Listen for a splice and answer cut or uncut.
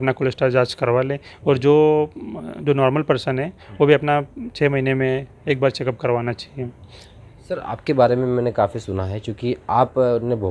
uncut